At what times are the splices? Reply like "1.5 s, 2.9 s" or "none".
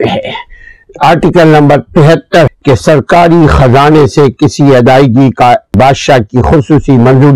2.5 s, 5.7 s

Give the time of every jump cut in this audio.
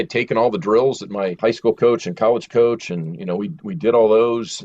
1.4 s

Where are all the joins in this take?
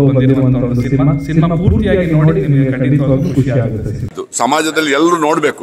4.2 s

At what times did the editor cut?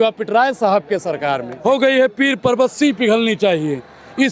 1.5 s

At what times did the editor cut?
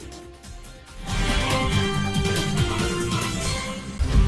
3.4 s

